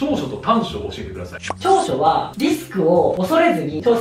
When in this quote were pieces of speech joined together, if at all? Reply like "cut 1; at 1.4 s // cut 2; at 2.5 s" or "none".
none